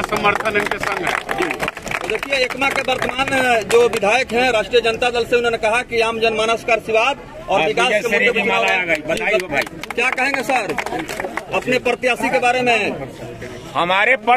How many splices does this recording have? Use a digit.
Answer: 0